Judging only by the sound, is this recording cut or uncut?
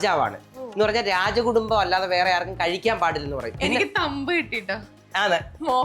cut